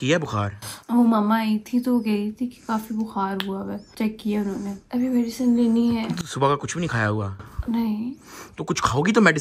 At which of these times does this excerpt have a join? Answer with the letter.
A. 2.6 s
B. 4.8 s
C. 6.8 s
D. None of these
D